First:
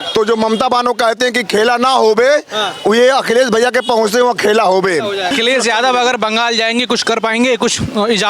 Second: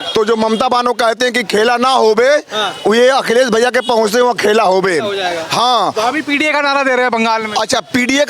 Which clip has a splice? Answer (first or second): first